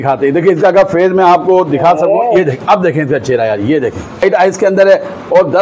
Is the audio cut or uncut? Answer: cut